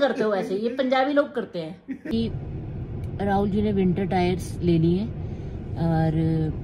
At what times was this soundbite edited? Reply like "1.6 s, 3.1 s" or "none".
2.1 s